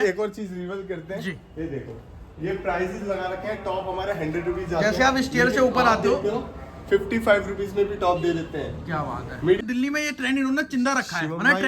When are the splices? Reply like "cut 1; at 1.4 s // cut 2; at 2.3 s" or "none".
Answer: cut 1; at 9.6 s

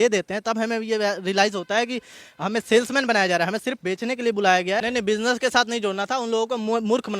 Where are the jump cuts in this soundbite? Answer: cut 1; at 4.8 s

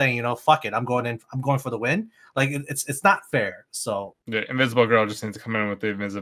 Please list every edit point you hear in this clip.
cut 1; at 4.2 s

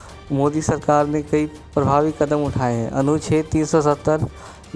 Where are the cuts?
cut 1; at 1.6 s

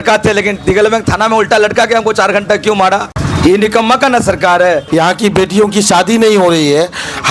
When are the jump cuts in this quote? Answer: cut 1; at 3.2 s // cut 2; at 4.8 s

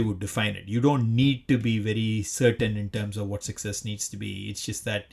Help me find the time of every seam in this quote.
none

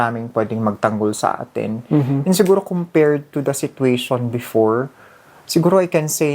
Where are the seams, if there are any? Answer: none

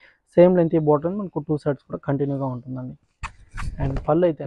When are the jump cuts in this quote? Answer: none

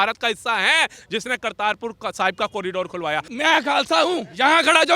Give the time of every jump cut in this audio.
cut 1; at 3.3 s

